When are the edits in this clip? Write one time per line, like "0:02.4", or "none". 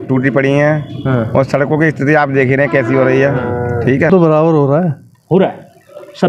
0:04.1